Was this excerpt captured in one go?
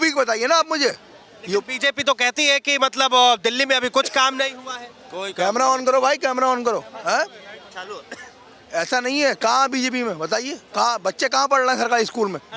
yes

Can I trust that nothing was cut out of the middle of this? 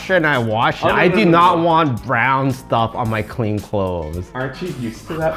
yes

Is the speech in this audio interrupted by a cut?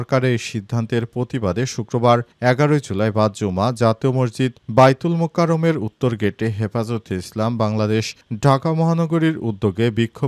no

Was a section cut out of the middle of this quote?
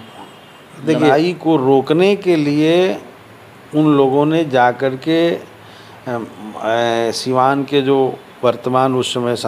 yes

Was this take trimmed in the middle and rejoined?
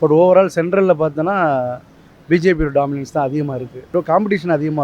yes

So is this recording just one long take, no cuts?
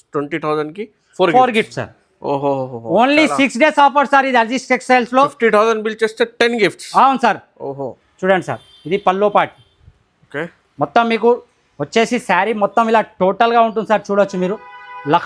no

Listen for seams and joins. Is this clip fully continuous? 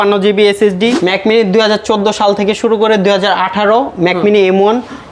no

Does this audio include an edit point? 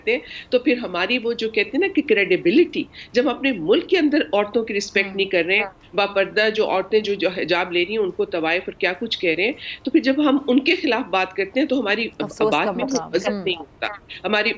no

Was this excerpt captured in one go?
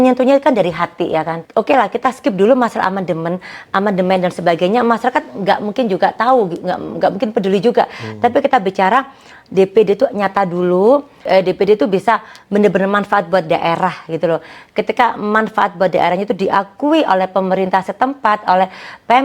no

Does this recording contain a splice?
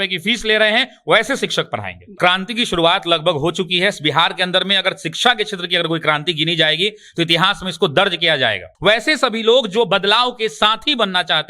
yes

